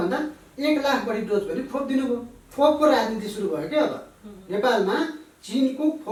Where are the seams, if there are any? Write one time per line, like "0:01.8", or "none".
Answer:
none